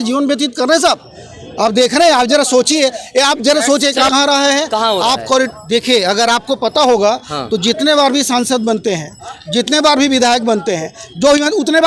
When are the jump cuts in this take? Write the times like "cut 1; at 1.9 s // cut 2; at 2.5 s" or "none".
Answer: cut 1; at 4.1 s